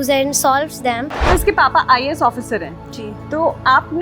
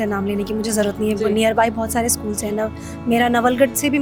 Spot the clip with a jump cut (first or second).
first